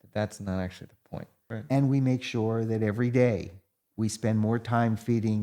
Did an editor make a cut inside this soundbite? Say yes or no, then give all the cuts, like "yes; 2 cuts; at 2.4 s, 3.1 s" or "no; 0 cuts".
yes; 1 cut; at 1.4 s